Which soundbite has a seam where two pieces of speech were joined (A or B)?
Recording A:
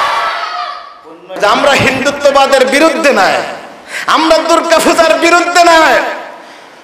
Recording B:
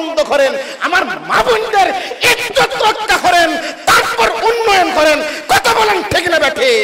A